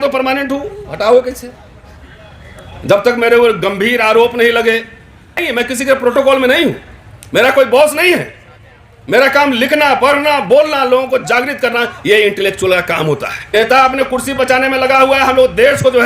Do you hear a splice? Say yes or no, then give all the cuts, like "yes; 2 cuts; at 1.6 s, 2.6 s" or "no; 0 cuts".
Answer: yes; 2 cuts; at 5.4 s, 13.3 s